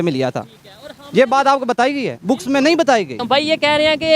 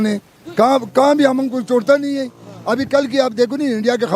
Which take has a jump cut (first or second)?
first